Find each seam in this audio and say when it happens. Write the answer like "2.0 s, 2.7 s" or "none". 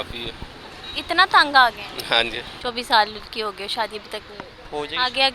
2.4 s